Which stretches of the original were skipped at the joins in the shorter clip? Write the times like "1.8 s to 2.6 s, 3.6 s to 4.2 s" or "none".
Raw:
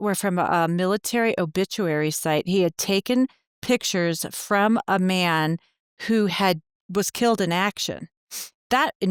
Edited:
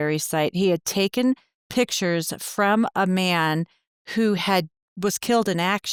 none